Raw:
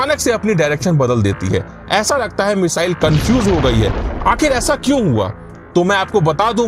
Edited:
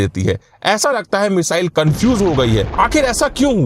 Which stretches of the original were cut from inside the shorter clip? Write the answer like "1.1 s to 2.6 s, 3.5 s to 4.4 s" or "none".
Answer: 3.9 s to 4.2 s